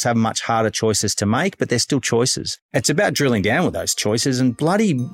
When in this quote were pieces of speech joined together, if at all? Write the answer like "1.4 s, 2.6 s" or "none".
2.6 s